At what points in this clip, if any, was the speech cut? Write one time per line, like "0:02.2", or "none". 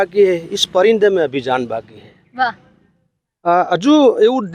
none